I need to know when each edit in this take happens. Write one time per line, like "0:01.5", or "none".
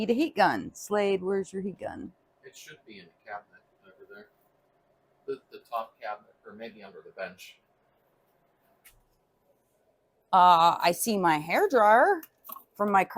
none